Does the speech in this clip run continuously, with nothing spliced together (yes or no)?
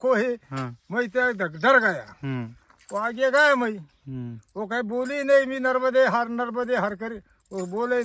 yes